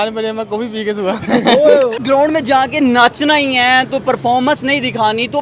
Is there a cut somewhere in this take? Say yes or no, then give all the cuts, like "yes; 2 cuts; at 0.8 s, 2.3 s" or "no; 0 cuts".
yes; 1 cut; at 1.9 s